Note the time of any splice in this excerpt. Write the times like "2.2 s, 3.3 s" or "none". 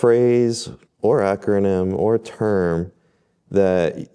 none

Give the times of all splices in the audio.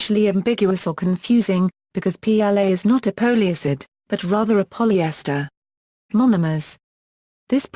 none

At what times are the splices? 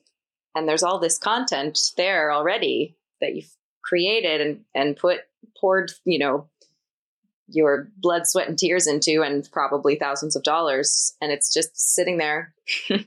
none

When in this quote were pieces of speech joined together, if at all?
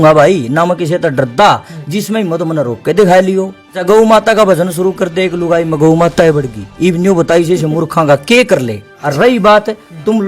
3.8 s, 8.9 s

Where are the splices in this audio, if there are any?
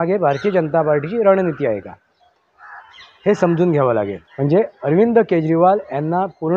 4.2 s

